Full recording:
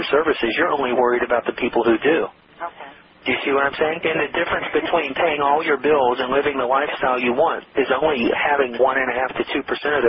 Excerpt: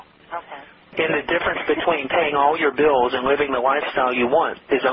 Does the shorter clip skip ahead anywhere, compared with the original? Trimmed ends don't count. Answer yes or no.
yes